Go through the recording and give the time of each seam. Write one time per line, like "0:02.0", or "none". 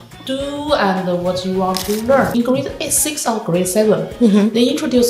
0:02.4